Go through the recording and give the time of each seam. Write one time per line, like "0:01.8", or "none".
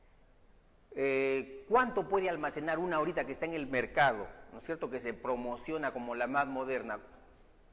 none